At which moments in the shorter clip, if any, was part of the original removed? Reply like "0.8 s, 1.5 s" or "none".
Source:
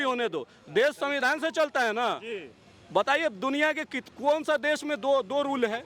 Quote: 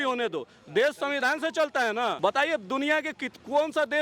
2.2 s

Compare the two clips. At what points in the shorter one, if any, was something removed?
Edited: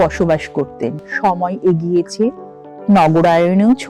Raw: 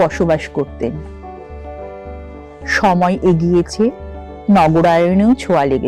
1.1 s

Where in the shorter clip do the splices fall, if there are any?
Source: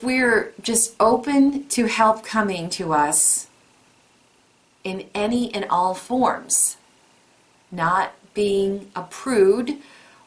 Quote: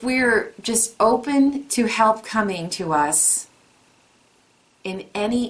none

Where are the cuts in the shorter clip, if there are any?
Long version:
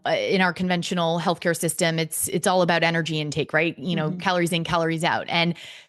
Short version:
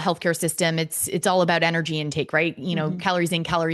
none

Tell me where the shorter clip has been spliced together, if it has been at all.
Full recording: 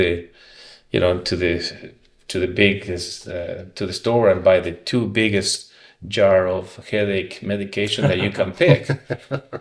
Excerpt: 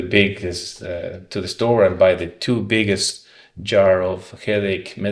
none

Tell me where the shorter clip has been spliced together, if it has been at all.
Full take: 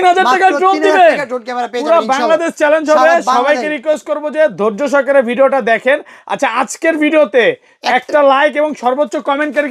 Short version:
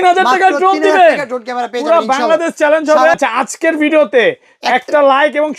3.1 s

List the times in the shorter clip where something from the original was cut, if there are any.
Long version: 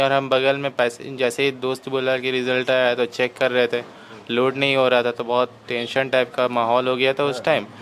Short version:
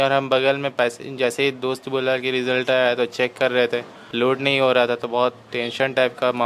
4.0 s

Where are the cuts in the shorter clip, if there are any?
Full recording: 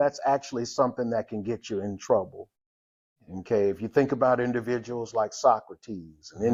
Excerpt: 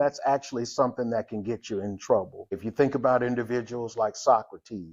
2.6 s

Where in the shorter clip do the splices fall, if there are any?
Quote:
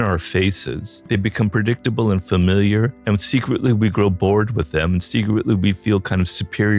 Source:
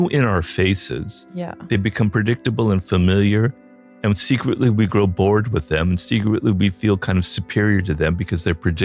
0.9 s, 3.0 s

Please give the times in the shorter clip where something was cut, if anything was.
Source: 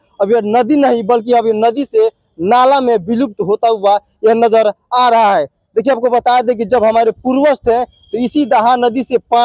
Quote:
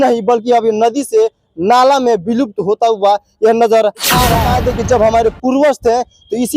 4.4 s

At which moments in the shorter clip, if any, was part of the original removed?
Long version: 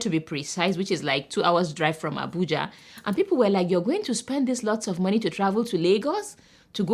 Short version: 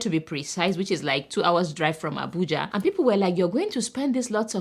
2.7 s

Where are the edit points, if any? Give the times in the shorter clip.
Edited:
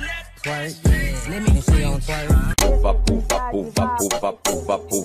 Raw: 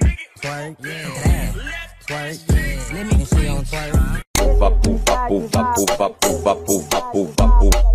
2.5 s

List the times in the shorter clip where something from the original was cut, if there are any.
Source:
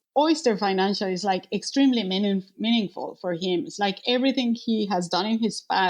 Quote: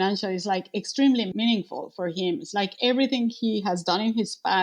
1.3 s

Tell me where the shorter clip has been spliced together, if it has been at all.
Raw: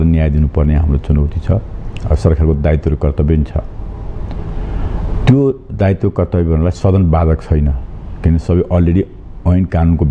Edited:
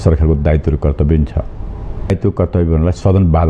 2.1 s

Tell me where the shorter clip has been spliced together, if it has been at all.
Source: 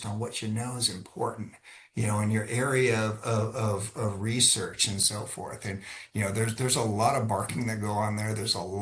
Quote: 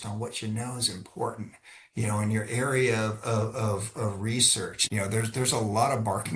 4.8 s

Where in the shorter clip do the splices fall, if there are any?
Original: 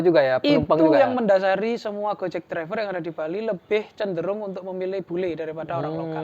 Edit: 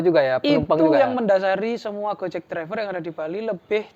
none

